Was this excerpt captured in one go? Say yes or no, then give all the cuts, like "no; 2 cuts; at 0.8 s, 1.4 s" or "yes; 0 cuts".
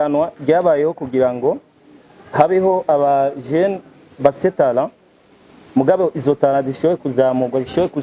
yes; 0 cuts